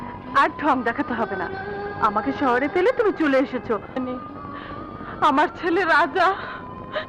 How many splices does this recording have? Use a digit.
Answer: 1